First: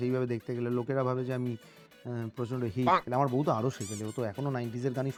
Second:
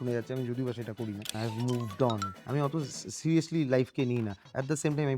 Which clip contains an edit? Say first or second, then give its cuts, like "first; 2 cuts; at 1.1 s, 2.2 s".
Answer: second; 2 cuts; at 1.3 s, 2.3 s